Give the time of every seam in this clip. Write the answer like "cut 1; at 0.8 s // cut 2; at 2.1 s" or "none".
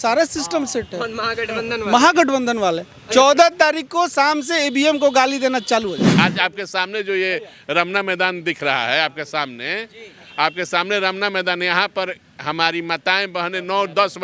cut 1; at 6.1 s